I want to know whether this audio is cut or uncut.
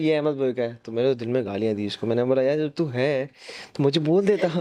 uncut